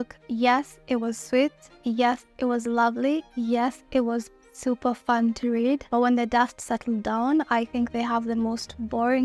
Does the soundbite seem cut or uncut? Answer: uncut